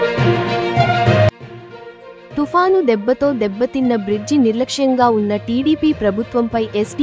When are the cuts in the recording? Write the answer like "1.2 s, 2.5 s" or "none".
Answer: 1.4 s